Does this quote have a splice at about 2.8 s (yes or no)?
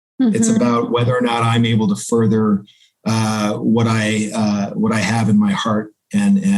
no